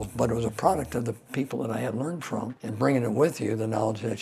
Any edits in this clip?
yes; 1 cut; at 2.6 s

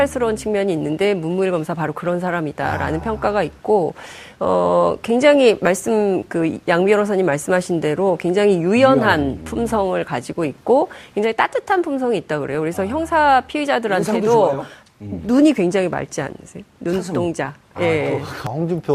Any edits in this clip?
no; 0 cuts

